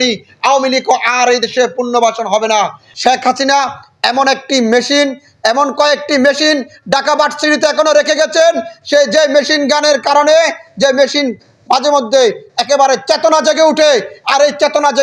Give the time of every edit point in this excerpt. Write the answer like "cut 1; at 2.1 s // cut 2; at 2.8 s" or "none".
cut 1; at 2.8 s